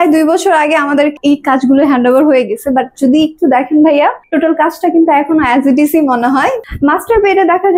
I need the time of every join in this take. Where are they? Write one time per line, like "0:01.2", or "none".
0:01.2
0:06.6